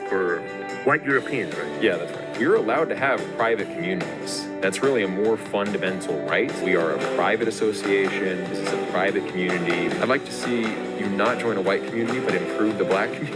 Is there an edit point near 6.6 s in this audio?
yes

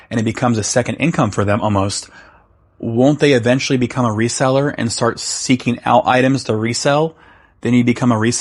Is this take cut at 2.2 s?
no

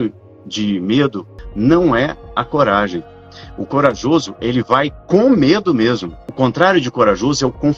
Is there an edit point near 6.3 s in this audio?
yes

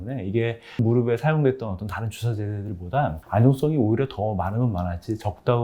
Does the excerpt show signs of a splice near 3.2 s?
yes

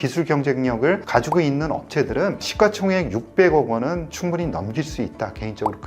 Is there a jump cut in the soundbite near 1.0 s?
yes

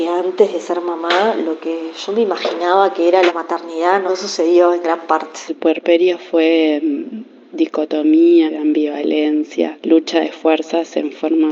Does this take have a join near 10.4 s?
no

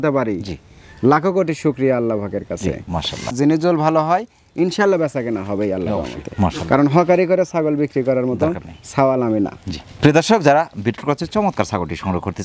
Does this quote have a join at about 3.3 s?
no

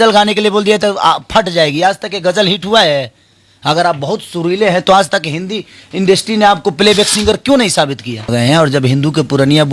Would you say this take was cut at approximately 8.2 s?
yes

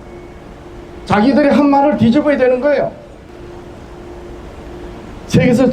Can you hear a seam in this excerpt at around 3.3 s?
yes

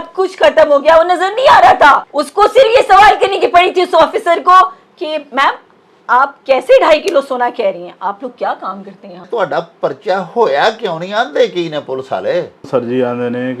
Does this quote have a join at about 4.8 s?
no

